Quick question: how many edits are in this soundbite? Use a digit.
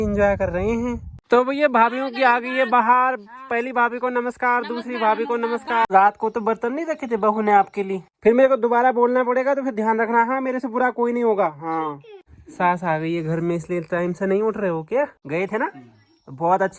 5